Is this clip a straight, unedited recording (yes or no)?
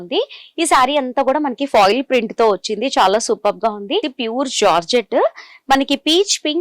no